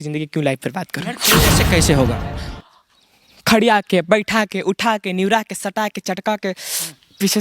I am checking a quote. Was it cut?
yes; 1 cut; at 1.3 s

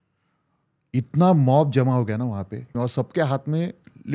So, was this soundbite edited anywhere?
yes; 1 cut; at 2.7 s

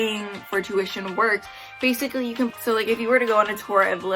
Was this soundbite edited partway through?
yes; 1 cut; at 2.6 s

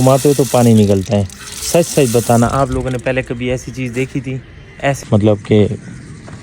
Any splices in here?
yes; 1 cut; at 5.0 s

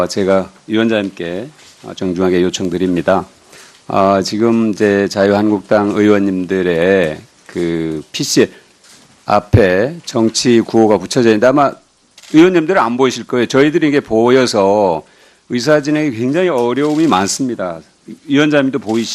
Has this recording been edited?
no; 0 cuts

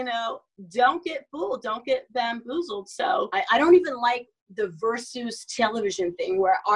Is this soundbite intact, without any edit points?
no; 1 cut; at 3.3 s

